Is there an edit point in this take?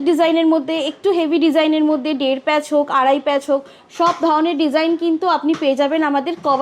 no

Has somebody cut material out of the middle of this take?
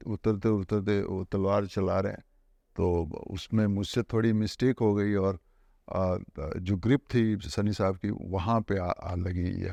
no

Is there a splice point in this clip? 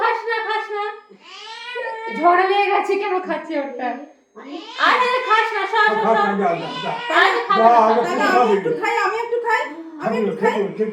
no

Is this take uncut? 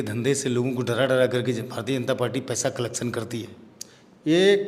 yes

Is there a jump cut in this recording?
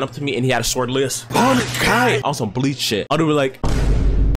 no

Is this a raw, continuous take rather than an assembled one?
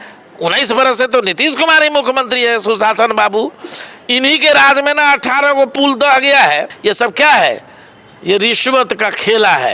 yes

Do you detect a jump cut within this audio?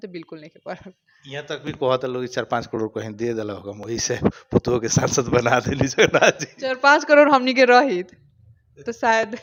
no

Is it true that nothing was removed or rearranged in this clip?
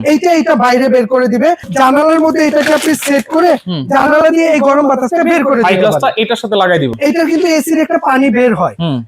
no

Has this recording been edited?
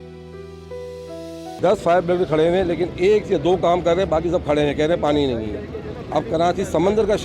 yes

